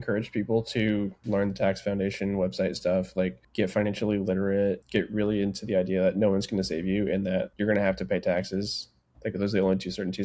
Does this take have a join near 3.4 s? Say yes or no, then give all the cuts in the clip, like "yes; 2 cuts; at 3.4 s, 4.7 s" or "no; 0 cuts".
yes; 4 cuts; at 1.2 s, 3.4 s, 4.8 s, 7.5 s